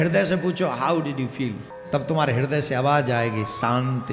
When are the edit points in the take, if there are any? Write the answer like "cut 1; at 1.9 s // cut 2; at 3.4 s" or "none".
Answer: cut 1; at 1.7 s